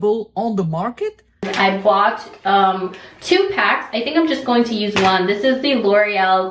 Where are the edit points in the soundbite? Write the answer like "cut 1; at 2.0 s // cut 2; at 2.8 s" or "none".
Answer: cut 1; at 1.5 s